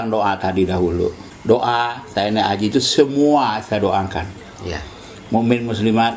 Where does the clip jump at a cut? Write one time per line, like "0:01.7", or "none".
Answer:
0:01.3